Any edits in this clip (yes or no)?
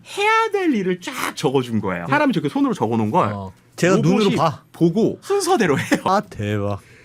yes